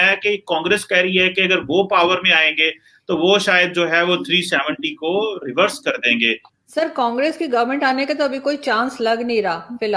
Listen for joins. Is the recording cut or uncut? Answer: uncut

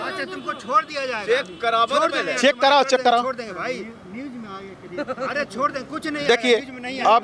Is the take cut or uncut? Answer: uncut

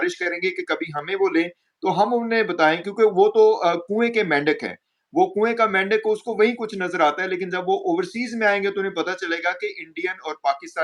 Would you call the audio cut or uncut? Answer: uncut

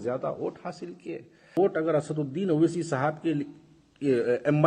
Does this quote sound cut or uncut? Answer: cut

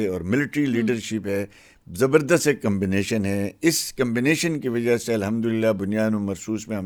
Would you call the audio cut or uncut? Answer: uncut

